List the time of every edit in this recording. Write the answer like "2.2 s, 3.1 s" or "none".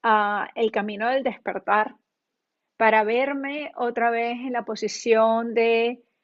none